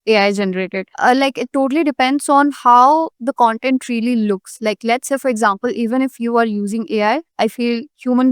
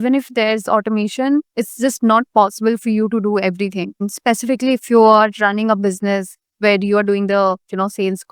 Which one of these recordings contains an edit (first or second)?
first